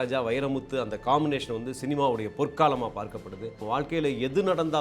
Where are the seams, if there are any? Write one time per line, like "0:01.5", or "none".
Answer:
0:03.5